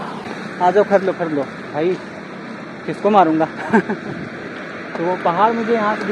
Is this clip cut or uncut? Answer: uncut